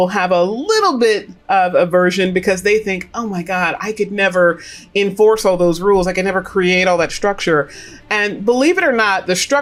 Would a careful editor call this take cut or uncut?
uncut